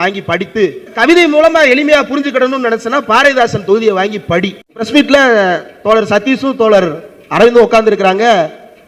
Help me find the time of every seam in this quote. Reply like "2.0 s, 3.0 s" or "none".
1.0 s, 4.9 s